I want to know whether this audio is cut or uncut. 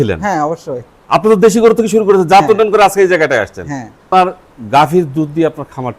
cut